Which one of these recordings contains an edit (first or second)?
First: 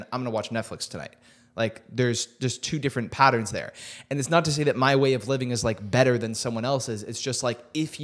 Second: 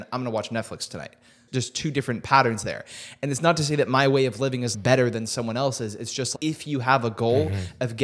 second